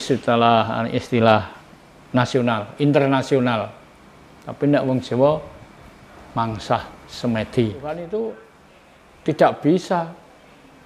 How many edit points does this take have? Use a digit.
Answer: 1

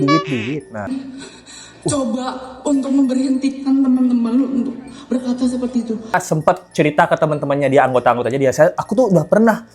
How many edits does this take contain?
2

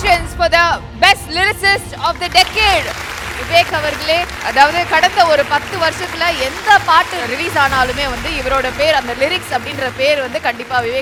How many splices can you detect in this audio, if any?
0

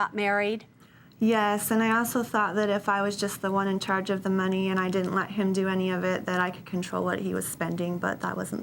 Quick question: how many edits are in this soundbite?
0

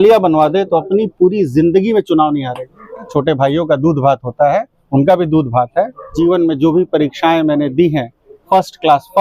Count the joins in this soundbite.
2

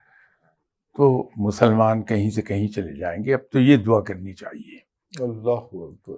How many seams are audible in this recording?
0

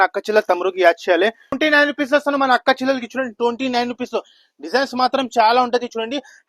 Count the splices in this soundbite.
1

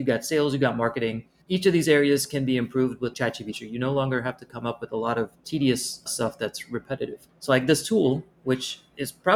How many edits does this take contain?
2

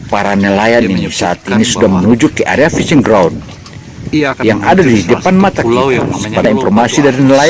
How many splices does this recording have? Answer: 1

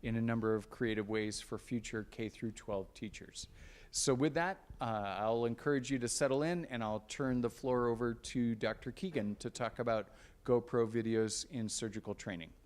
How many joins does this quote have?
1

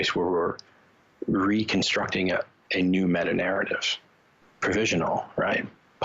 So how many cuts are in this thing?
1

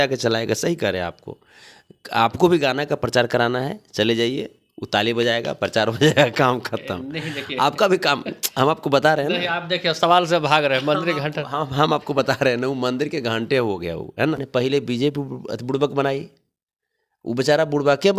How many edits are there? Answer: 1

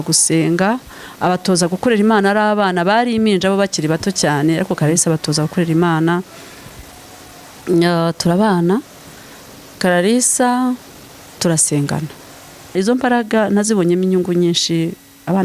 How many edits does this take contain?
1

